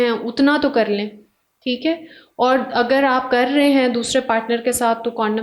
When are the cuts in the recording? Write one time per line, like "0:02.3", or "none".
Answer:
none